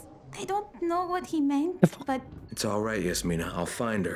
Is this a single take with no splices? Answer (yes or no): no